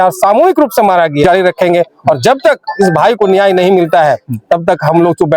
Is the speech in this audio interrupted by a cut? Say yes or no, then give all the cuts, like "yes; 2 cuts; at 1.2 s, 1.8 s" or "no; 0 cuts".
no; 0 cuts